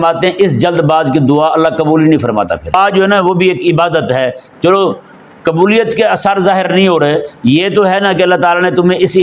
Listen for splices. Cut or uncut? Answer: cut